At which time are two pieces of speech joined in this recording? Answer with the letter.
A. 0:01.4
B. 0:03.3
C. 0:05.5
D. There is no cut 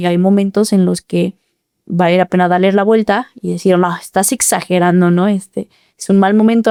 D